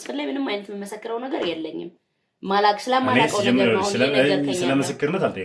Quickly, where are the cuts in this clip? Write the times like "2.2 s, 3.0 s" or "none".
none